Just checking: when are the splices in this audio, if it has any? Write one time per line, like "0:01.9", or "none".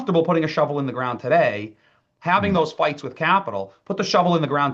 none